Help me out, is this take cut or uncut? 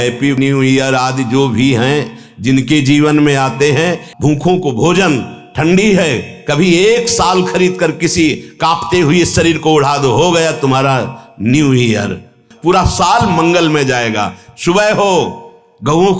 cut